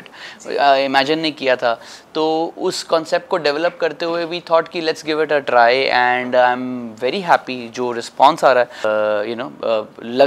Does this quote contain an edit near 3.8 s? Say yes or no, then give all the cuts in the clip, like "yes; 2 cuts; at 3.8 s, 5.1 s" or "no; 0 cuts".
no; 1 cut; at 8.8 s